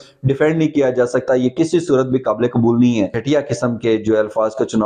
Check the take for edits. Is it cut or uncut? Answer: cut